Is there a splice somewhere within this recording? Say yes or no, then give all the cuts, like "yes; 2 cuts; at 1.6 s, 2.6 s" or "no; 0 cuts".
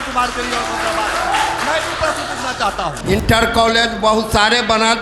yes; 1 cut; at 3.0 s